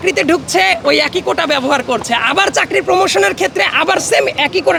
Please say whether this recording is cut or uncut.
uncut